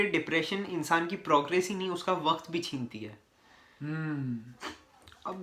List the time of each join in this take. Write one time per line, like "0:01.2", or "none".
none